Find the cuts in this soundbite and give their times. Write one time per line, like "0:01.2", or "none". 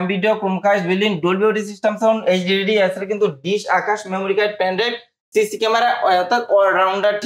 none